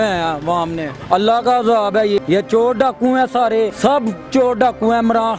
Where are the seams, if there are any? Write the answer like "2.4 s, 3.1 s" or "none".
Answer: 0.9 s, 2.2 s, 3.7 s